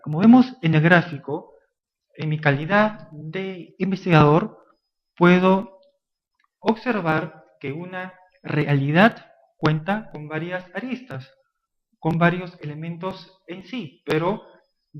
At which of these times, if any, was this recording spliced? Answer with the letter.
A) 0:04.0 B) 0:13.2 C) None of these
A